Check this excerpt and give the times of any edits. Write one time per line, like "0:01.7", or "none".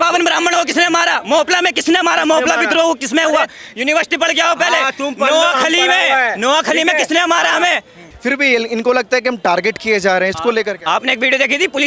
0:08.0